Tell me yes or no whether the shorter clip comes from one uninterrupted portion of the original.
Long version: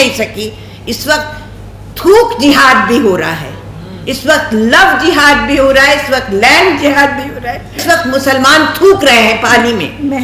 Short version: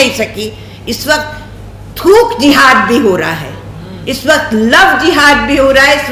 yes